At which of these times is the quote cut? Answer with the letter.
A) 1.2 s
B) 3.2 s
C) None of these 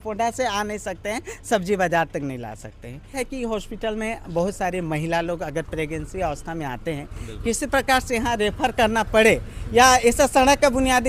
B